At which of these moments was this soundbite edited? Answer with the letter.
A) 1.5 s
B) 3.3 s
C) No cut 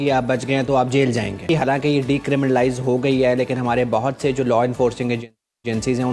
A